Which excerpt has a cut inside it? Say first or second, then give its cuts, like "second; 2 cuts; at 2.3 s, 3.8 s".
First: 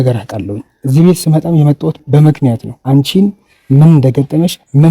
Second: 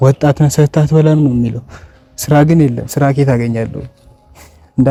first; 1 cut; at 2.7 s